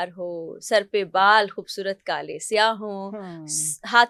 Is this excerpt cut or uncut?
uncut